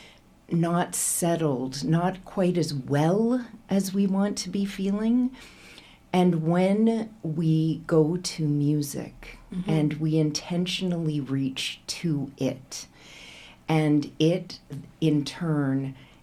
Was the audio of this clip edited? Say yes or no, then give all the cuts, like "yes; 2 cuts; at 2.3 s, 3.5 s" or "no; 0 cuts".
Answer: no; 0 cuts